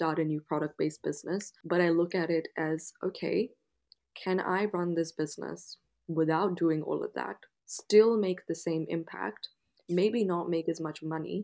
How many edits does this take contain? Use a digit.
1